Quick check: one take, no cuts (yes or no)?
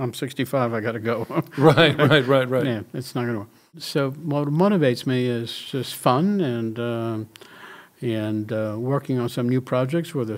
no